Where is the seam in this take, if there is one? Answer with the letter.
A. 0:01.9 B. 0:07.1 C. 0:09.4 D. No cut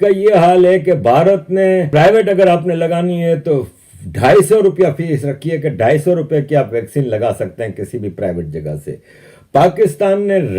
A